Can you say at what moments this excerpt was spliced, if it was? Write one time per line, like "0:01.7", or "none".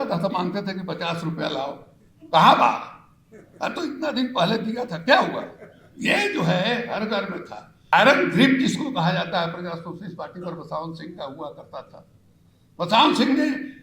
0:07.9